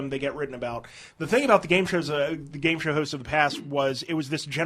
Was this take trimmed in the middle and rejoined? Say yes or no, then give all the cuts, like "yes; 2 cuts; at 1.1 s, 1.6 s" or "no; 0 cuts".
no; 0 cuts